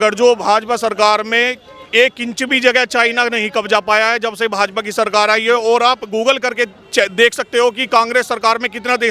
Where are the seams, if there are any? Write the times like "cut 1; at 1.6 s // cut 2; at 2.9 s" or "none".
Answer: none